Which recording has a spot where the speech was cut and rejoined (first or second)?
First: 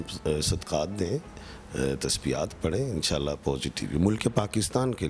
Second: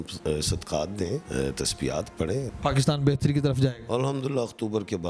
second